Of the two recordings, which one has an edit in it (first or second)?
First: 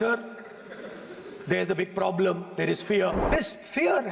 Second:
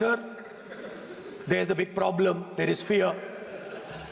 first